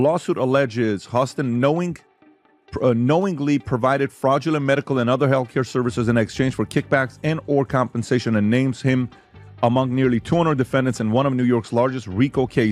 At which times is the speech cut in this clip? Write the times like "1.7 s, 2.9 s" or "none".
none